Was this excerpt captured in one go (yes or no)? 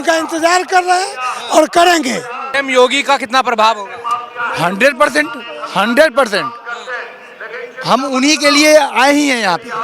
no